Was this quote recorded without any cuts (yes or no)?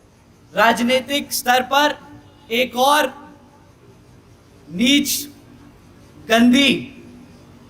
yes